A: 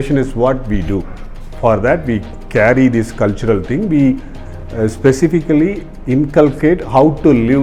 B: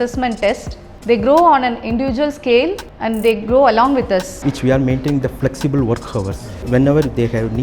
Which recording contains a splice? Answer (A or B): B